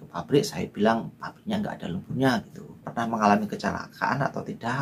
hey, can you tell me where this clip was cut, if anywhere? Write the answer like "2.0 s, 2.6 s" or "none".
2.8 s

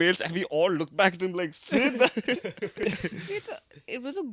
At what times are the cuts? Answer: 2.8 s

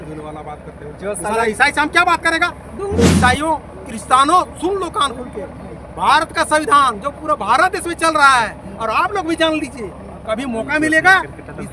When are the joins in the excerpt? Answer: 3.2 s

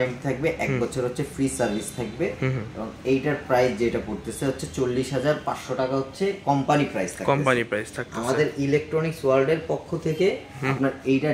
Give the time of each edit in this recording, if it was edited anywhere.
none

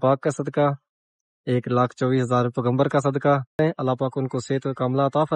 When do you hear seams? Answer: 3.6 s

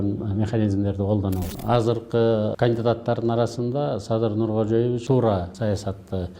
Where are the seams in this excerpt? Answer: 1.4 s, 2.5 s, 5.2 s

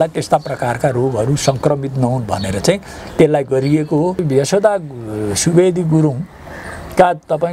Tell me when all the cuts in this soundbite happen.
4.2 s

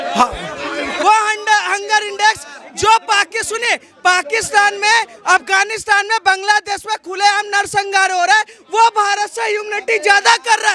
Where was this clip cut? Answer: 1.0 s

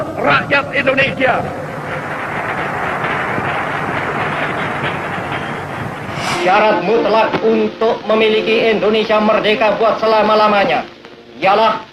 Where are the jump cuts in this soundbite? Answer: 6.3 s

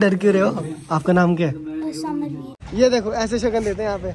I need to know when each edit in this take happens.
2.7 s

